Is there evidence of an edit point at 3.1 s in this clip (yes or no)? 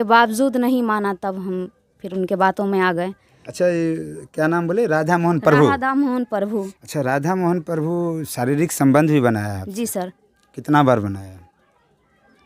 no